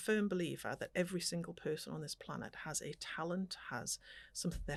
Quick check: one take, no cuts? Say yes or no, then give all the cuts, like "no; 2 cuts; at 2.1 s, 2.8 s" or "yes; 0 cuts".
yes; 0 cuts